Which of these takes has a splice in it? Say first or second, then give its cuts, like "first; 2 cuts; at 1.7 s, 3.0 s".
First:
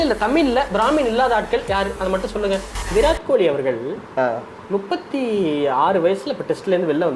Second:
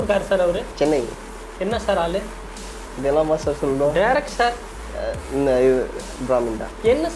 first; 1 cut; at 2.8 s